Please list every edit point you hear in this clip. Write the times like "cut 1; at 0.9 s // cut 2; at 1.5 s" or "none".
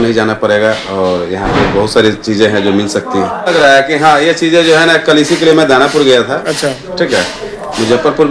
cut 1; at 3.5 s